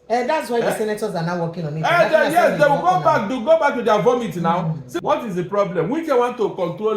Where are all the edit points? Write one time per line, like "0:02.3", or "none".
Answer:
0:04.8

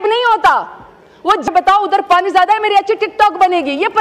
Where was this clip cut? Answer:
0:01.5

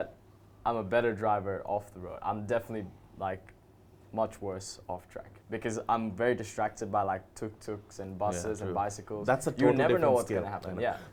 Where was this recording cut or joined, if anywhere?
none

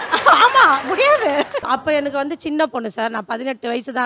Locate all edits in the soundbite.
0:01.6

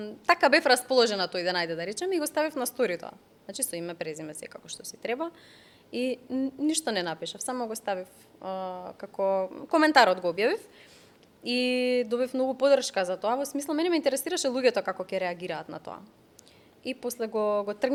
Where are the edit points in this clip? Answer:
none

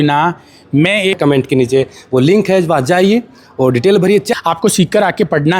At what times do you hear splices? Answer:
0:01.2
0:04.3

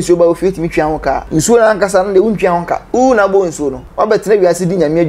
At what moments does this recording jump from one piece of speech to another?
0:01.2
0:02.8
0:03.8

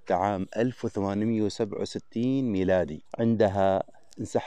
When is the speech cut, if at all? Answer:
0:03.0

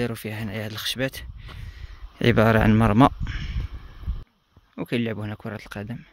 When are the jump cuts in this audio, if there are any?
0:04.2

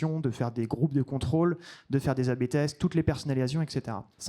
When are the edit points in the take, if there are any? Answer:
none

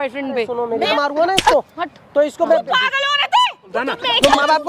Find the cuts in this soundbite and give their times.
0:00.9
0:03.8

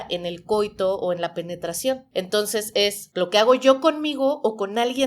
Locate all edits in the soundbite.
0:02.0
0:03.0

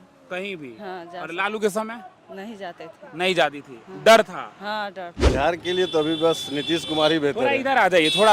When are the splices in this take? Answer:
0:05.1

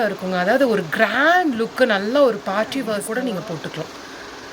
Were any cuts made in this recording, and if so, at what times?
0:03.0

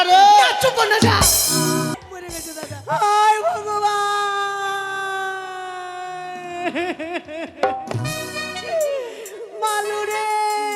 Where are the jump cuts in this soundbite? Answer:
0:01.9

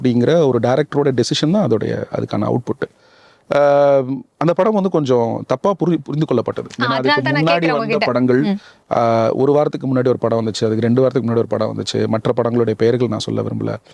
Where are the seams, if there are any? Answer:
none

